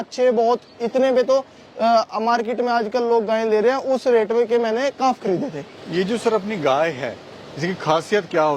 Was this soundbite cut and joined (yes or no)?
no